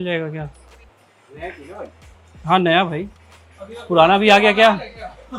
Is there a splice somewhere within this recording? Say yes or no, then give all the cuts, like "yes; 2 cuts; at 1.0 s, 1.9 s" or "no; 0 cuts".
no; 0 cuts